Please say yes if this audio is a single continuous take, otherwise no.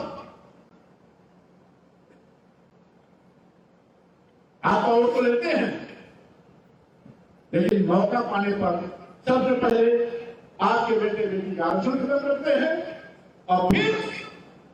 yes